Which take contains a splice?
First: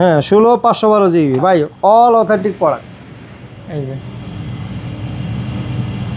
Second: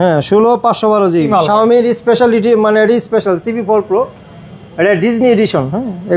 second; 1 cut; at 1.3 s

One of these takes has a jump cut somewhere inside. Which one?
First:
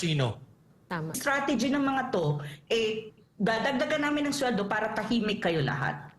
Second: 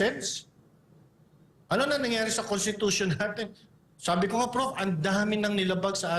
first; 1 cut; at 1.2 s

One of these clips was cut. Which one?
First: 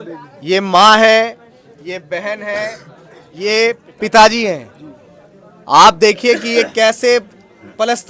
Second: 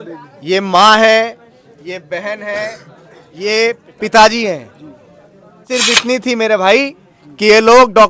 second; 1 cut; at 5.7 s

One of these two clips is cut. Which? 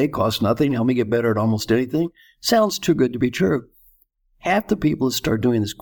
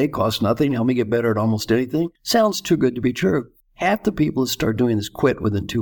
second; 2 cuts; at 2.2 s, 3.6 s

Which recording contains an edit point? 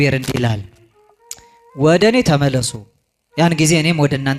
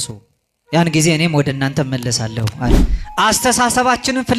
second; 1 cut; at 2.7 s

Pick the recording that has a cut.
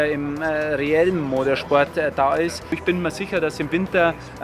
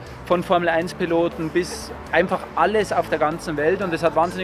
first; 1 cut; at 2.8 s

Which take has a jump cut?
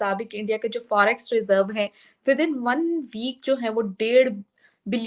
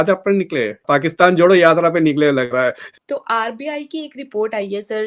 second; 2 cuts; at 0.8 s, 3.0 s

